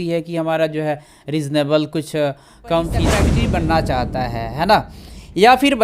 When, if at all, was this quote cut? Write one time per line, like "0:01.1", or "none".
0:03.2